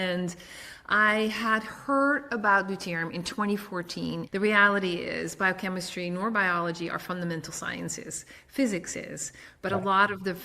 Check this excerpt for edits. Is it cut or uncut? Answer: cut